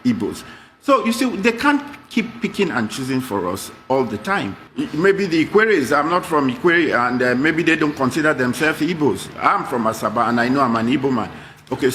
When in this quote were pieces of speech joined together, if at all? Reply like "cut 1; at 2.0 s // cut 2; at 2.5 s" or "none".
cut 1; at 4.8 s